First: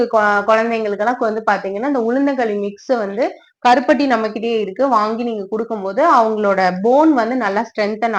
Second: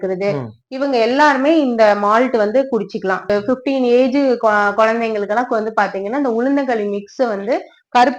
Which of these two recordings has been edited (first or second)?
second